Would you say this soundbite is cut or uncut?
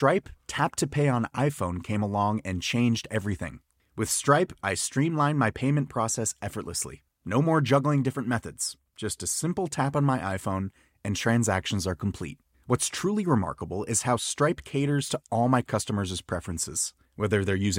uncut